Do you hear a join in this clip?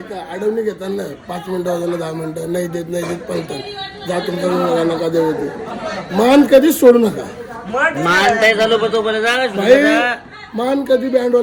no; 0 cuts

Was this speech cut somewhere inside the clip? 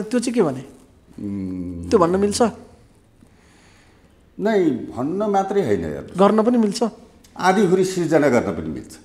no; 0 cuts

